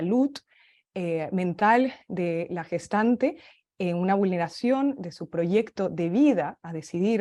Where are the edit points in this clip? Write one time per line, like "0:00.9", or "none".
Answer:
none